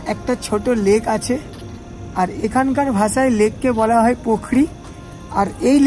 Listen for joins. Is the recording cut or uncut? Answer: uncut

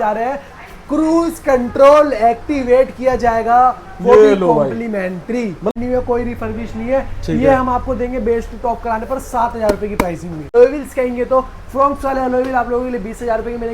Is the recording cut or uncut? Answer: cut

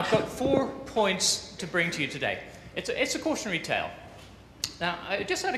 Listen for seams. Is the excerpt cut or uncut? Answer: cut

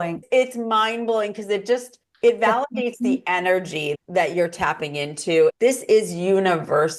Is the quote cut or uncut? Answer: cut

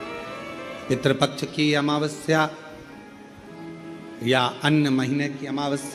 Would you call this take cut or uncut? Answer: uncut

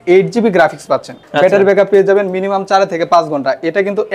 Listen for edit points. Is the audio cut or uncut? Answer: cut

